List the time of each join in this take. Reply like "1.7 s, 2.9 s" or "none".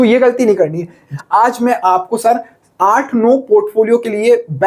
1.1 s